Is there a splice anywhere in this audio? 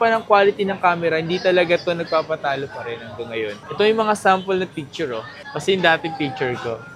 no; 0 cuts

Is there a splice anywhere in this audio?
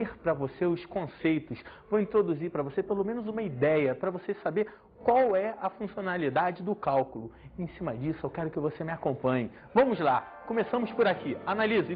yes; 1 cut; at 5.5 s

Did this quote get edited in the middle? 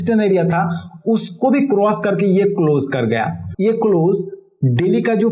yes; 1 cut; at 3.4 s

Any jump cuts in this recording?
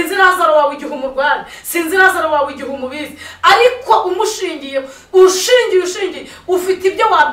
no; 0 cuts

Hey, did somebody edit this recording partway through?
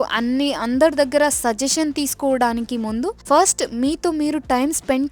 no; 0 cuts

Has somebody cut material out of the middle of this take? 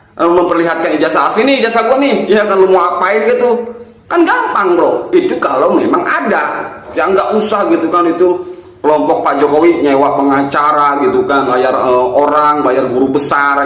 yes; 2 cuts; at 6.9 s, 11.5 s

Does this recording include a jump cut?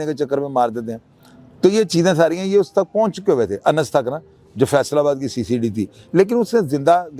no; 0 cuts

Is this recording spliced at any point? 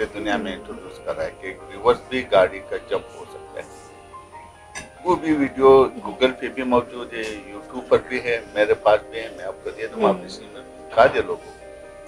no; 0 cuts

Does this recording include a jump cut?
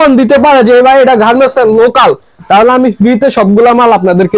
no; 0 cuts

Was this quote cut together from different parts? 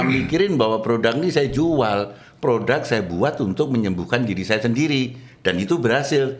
no; 0 cuts

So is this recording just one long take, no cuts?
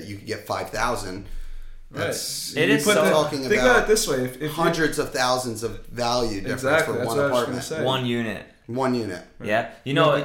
yes; 0 cuts

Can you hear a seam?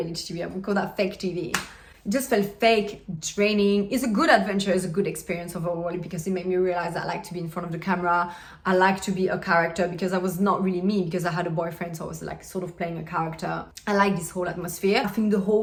no; 0 cuts

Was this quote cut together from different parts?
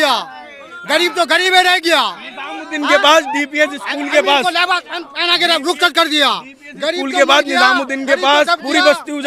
no; 0 cuts

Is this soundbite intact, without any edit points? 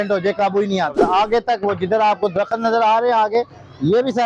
no; 1 cut; at 0.9 s

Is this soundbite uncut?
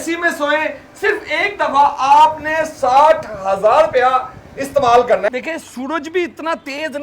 no; 1 cut; at 5.3 s

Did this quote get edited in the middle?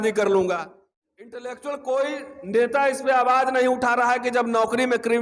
yes; 1 cut; at 1.4 s

